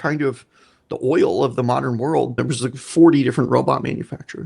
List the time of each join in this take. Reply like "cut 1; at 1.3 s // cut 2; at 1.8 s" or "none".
cut 1; at 2.4 s